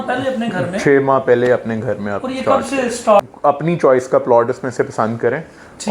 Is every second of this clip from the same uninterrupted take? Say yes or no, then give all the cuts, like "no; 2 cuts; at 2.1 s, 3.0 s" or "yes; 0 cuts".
no; 1 cut; at 3.2 s